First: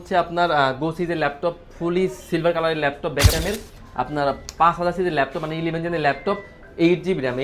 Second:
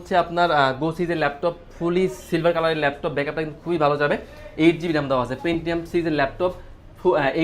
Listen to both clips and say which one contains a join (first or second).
first